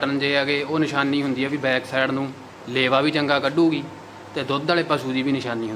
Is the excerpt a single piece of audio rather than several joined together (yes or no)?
yes